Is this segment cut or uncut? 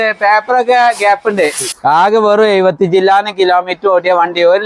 cut